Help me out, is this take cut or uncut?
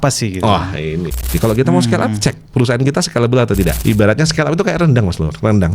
cut